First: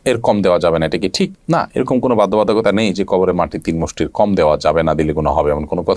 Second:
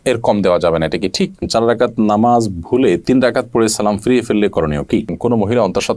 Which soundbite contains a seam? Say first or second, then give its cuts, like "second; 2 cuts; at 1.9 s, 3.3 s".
second; 2 cuts; at 1.4 s, 5.1 s